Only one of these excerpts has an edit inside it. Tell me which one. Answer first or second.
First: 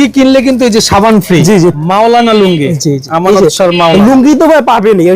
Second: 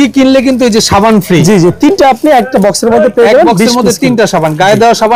first